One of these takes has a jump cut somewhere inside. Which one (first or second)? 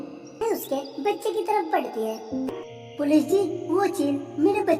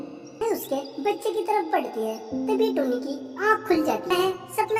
first